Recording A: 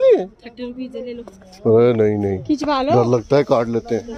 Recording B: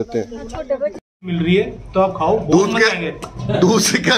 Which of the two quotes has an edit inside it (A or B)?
B